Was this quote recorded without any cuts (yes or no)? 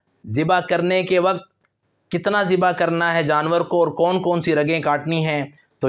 yes